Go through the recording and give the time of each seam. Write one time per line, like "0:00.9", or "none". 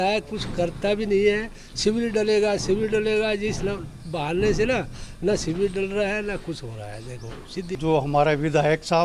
0:07.6